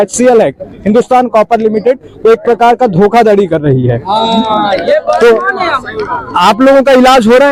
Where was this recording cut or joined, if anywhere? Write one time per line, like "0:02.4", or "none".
none